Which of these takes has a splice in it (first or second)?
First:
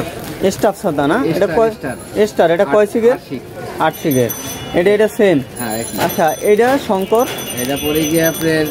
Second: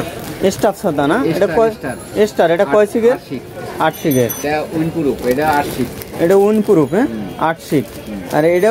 second